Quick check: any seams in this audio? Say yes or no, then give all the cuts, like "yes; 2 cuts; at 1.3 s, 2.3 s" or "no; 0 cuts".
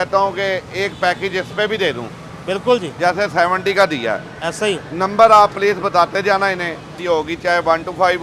yes; 1 cut; at 6.9 s